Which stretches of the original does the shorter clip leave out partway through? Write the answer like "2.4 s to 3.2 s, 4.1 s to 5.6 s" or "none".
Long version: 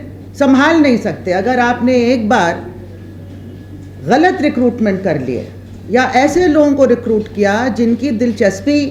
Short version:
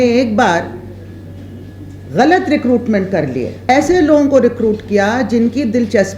5.6 s to 6.1 s